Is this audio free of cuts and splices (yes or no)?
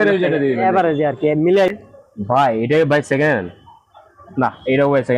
no